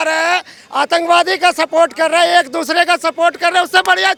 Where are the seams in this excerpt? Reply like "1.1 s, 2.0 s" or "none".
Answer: none